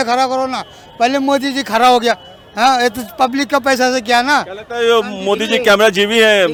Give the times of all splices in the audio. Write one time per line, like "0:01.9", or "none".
none